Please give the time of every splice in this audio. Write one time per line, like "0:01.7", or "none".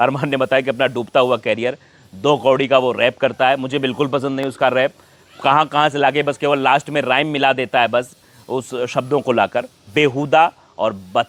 none